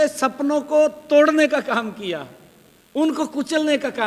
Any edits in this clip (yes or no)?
no